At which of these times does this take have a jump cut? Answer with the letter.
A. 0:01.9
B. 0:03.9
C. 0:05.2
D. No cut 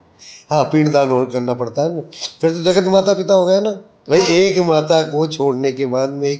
B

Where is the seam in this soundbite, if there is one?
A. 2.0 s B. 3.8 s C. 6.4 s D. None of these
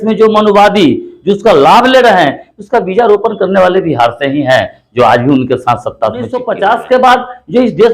C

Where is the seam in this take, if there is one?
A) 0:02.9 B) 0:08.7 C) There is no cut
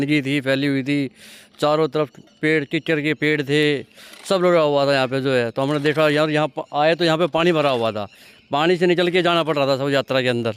C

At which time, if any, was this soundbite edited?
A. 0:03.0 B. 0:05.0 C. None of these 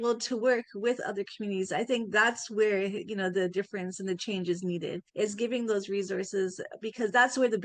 B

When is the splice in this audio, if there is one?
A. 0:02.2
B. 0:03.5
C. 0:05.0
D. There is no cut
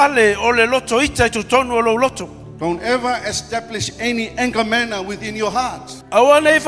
D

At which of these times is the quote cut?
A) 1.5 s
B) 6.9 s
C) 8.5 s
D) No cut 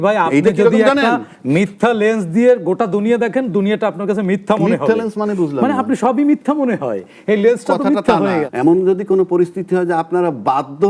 C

